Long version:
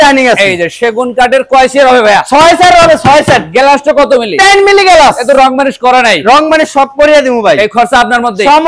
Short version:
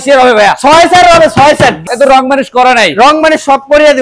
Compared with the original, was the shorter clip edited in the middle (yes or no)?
yes